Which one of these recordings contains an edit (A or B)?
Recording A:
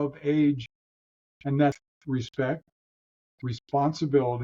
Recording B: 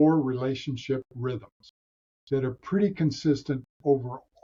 A